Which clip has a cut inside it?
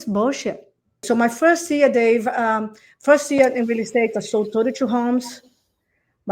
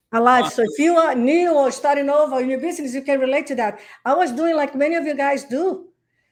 first; 1 cut; at 1.0 s

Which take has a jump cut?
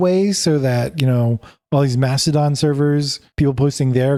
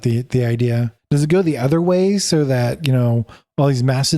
second; 1 cut; at 0.9 s

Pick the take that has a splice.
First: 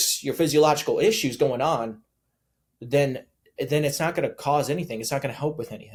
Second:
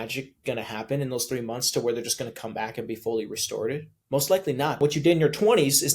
second; 2 cuts; at 3.9 s, 4.8 s

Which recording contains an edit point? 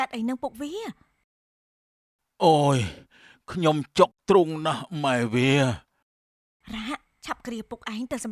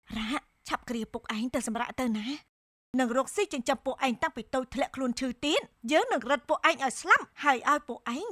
second; 1 cut; at 2.8 s

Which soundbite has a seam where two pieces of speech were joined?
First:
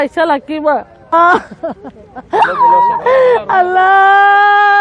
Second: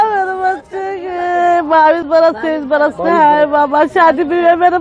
first; 1 cut; at 1.1 s

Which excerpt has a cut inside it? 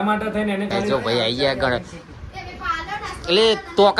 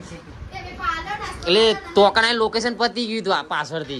first; 1 cut; at 0.9 s

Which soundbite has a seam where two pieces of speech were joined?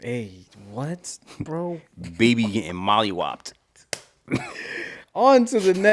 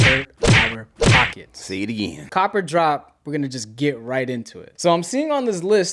second; 2 cuts; at 2.2 s, 4.7 s

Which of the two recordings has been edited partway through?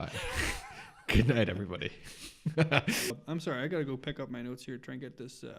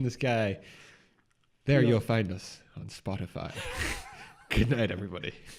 first; 1 cut; at 3.1 s

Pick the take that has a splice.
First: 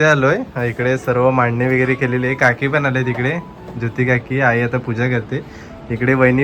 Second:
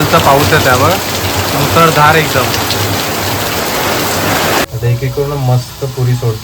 second; 1 cut; at 4.7 s

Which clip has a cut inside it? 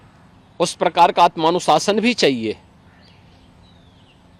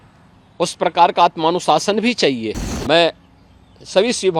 second; 1 cut; at 2.7 s

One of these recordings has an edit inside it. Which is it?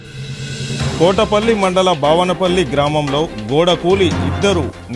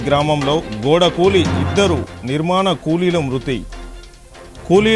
first; 1 cut; at 1.0 s

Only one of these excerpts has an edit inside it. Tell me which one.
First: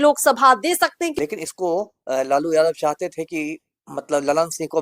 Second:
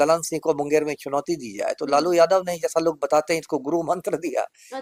first; 1 cut; at 1.1 s

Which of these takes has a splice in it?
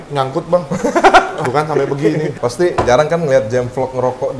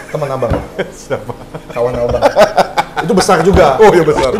first; 2 cuts; at 1.4 s, 2.3 s

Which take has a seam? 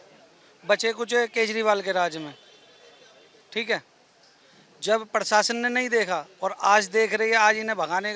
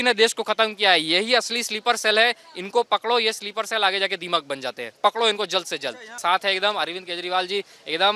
second; 1 cut; at 6.2 s

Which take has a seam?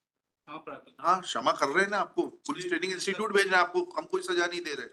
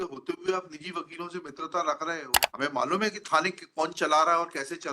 second; 1 cut; at 2.4 s

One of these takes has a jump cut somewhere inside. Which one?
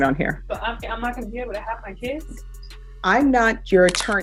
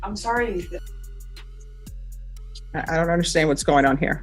second; 2 cuts; at 0.9 s, 2.7 s

